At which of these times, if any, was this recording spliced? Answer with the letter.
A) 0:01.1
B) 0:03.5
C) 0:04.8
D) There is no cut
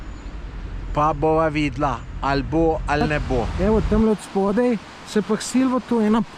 B